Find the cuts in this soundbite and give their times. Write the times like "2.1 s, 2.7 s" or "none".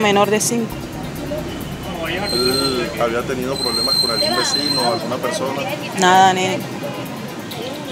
1.2 s